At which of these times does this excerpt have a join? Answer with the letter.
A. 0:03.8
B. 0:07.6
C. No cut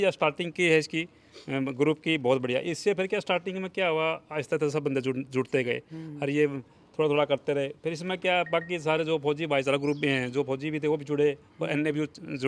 C